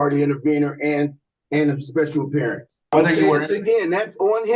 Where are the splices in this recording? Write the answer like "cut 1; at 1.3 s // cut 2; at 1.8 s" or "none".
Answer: cut 1; at 2.9 s